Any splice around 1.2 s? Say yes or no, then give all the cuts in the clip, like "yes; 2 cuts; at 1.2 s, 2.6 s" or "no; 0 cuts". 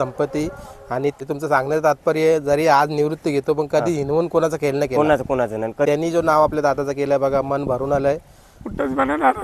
yes; 2 cuts; at 1.2 s, 5.9 s